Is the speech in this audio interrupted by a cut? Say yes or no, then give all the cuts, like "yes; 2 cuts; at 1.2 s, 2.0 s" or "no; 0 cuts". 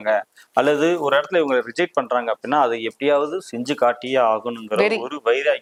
no; 0 cuts